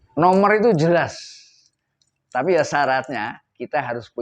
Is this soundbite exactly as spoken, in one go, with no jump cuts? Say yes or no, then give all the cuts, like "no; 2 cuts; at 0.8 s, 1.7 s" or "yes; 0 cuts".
yes; 0 cuts